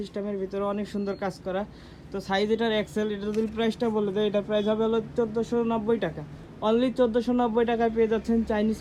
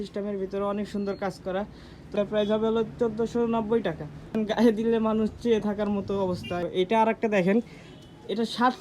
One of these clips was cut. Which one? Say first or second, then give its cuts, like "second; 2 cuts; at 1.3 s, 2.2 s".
second; 3 cuts; at 2.1 s, 4.3 s, 6.6 s